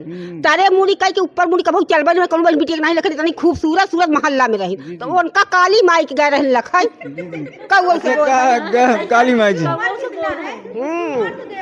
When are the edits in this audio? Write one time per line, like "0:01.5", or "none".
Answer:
none